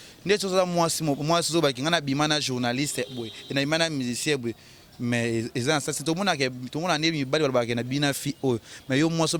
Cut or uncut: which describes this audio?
uncut